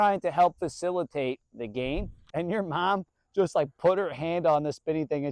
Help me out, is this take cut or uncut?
cut